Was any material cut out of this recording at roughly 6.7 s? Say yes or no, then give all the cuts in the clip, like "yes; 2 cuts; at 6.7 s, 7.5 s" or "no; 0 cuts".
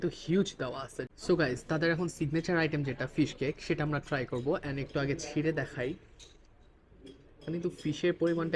no; 1 cut; at 0.9 s